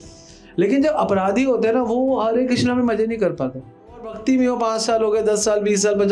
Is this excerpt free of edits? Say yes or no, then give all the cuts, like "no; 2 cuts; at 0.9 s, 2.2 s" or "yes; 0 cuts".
no; 1 cut; at 4.2 s